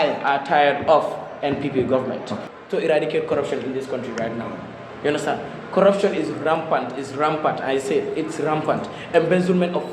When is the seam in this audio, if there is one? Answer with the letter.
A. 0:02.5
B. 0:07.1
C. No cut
A